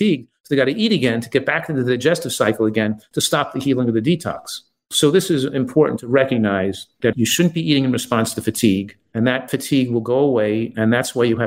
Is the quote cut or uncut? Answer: cut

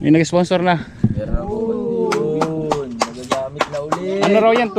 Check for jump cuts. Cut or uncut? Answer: uncut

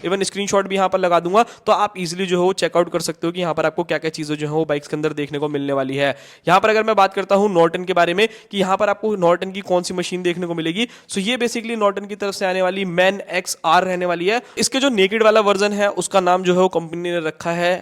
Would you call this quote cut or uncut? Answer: cut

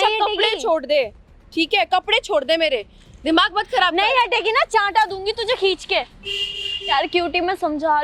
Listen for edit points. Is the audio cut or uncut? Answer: uncut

